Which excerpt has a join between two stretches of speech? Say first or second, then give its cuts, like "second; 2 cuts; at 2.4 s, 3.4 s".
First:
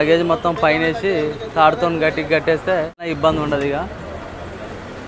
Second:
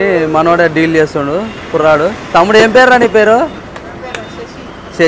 first; 1 cut; at 3.0 s